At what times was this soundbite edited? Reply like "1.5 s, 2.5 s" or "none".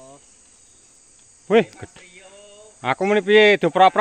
none